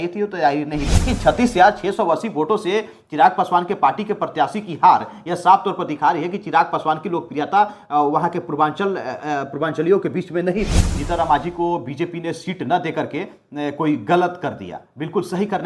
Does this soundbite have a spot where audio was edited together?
yes; 2 cuts; at 1.1 s, 11.0 s

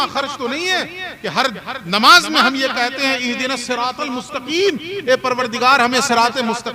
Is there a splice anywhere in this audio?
no; 0 cuts

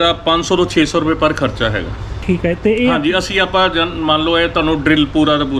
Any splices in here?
no; 0 cuts

